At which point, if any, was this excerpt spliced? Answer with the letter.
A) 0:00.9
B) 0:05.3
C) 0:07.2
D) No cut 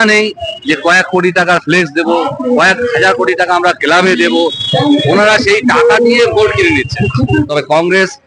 C